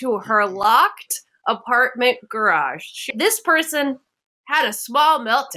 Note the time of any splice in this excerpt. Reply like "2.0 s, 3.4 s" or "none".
3.1 s

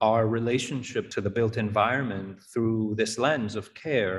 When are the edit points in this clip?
1.1 s

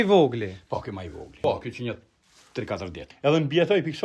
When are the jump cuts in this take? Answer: 1.3 s, 3.1 s

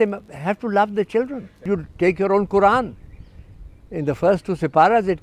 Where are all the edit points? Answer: 1.6 s

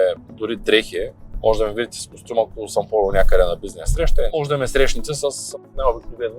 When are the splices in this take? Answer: 1.2 s, 4.3 s

